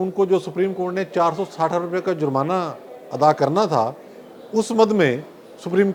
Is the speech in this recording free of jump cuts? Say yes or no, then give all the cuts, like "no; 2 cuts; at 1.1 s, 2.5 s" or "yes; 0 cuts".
yes; 0 cuts